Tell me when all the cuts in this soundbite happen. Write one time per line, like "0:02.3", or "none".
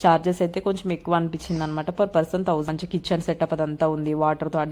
0:02.7